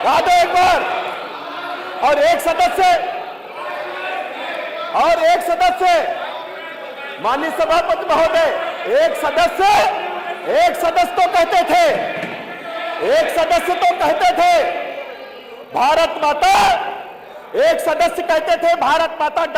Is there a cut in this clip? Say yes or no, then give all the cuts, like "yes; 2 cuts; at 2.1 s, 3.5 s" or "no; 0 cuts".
no; 0 cuts